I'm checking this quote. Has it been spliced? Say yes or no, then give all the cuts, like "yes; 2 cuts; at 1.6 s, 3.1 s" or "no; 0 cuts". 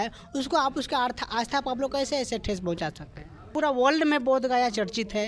yes; 1 cut; at 3.5 s